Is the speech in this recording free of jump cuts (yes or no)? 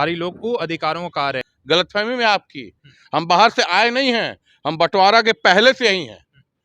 no